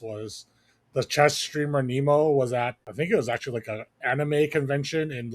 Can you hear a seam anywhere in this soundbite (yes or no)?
yes